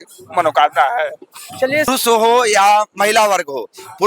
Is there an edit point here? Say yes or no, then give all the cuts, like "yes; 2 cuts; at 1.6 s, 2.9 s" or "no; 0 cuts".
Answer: yes; 1 cut; at 1.9 s